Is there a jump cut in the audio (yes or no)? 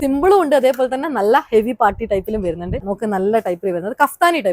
yes